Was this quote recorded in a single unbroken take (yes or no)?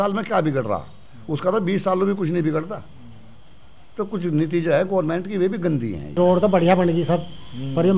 no